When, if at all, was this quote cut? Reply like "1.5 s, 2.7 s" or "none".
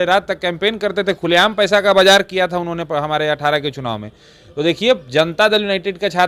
none